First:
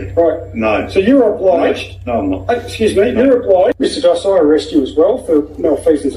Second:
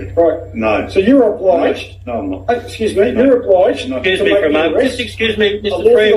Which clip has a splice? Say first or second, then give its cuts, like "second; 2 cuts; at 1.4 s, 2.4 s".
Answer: first; 1 cut; at 4.0 s